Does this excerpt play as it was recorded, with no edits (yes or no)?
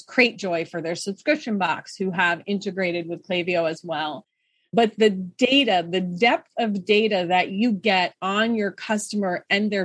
yes